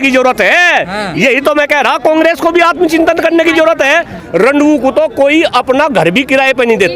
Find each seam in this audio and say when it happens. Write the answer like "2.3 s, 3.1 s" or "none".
4.2 s